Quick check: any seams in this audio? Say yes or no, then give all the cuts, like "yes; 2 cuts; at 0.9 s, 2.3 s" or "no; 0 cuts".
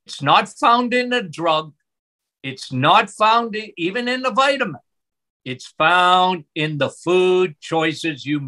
no; 0 cuts